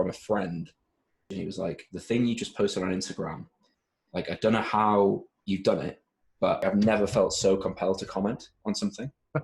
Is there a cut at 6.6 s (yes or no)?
yes